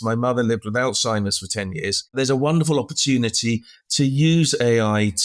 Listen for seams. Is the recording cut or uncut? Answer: cut